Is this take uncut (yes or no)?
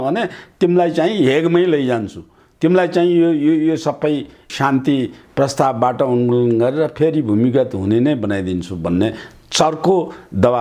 no